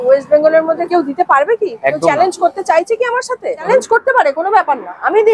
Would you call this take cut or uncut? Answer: uncut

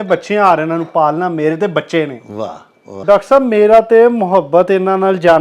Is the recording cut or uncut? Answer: cut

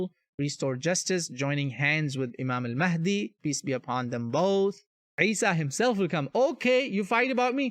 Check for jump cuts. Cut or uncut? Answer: cut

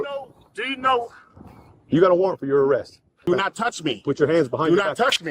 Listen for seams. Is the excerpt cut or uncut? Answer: cut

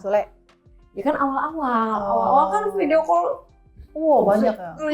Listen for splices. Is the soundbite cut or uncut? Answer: uncut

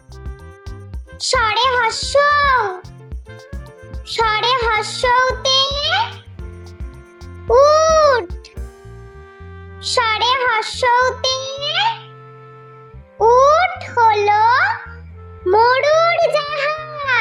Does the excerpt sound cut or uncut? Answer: uncut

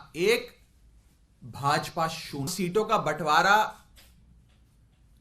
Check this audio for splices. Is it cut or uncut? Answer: cut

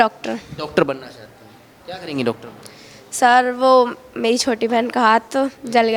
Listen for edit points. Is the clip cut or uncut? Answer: uncut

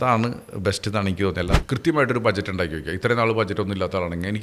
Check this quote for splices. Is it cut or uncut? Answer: cut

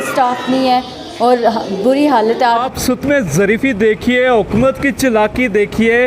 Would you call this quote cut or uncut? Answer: cut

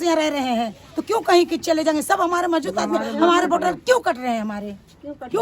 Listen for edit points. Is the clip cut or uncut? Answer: uncut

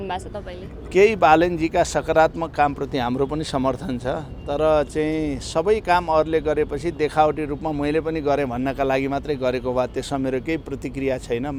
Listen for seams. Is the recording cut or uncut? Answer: uncut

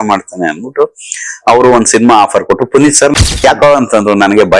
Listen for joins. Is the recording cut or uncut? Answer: cut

